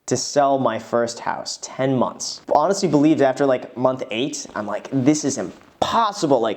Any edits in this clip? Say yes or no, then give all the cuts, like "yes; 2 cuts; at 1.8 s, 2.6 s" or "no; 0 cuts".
yes; 1 cut; at 2.4 s